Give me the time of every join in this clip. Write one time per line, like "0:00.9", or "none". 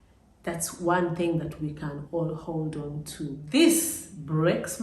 0:03.0